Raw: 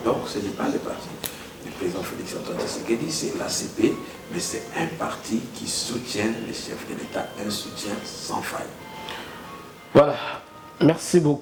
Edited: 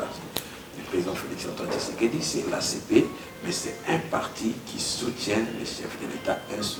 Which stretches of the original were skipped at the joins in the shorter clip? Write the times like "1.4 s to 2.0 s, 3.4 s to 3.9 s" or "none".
none